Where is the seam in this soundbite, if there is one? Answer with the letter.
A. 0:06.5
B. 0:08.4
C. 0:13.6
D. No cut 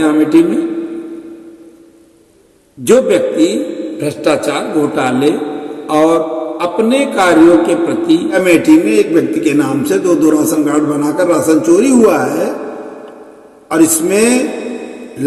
B